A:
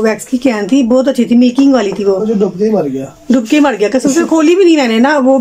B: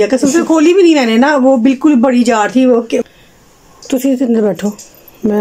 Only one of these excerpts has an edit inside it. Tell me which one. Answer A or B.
B